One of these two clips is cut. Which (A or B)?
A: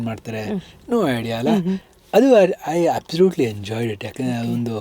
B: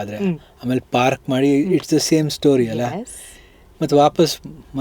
A